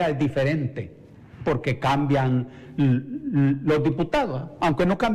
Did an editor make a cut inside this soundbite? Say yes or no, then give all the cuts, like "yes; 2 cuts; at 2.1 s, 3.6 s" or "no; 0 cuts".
no; 0 cuts